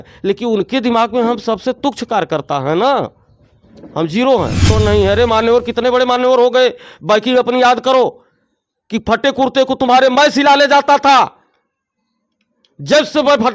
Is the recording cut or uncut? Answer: cut